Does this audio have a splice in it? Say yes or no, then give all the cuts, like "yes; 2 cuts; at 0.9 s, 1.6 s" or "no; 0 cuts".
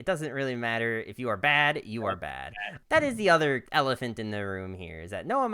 yes; 2 cuts; at 2.7 s, 3.7 s